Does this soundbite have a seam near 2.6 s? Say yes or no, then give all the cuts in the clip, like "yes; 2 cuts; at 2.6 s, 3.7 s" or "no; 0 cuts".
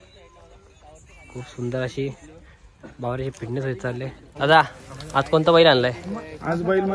no; 1 cut; at 4.3 s